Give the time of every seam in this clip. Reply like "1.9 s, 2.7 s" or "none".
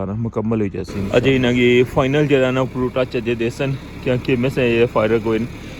1.1 s